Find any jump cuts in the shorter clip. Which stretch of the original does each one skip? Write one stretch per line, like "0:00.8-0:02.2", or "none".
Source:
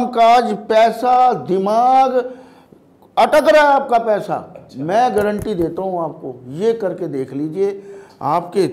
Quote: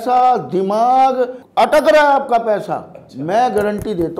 0:02.4-0:03.0